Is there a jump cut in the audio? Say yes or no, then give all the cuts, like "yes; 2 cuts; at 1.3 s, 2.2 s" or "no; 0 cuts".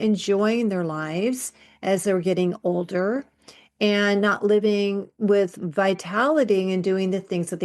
no; 0 cuts